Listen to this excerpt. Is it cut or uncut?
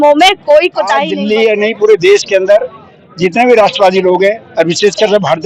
cut